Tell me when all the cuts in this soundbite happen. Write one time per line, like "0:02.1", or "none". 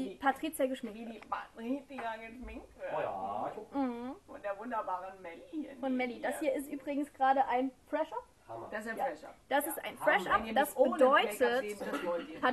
0:04.5